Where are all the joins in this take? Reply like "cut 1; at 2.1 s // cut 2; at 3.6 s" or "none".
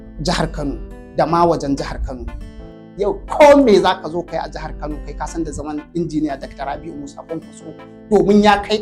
cut 1; at 2.6 s